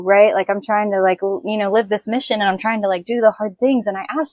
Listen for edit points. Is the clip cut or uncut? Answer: uncut